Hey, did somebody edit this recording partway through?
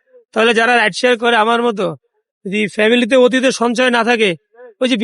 no; 0 cuts

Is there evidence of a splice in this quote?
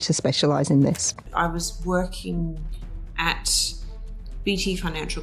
yes; 1 cut; at 1.3 s

